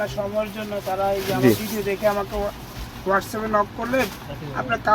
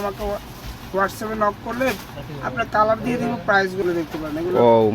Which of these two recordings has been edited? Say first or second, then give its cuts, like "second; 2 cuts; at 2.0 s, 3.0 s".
second; 1 cut; at 3.8 s